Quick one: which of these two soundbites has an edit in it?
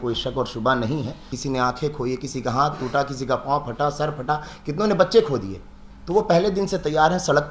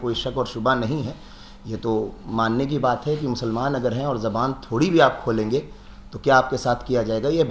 first; 1 cut; at 1.4 s

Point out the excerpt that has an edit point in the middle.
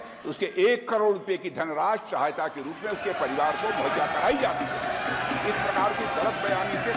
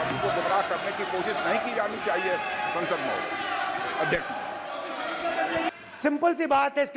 second; 1 cut; at 5.7 s

